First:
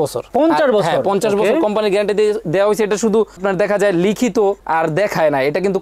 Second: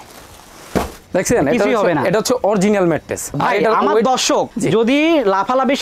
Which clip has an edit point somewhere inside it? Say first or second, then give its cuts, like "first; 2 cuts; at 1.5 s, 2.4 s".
second; 2 cuts; at 1.0 s, 3.3 s